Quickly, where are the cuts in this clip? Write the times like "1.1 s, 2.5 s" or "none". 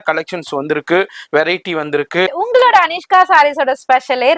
2.3 s